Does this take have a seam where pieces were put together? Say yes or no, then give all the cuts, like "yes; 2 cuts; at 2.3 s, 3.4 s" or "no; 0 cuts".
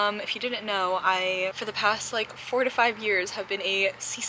no; 0 cuts